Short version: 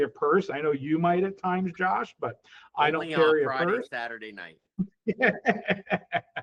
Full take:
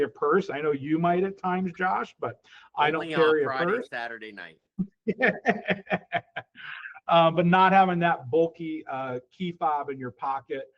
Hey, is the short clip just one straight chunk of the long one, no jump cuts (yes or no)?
yes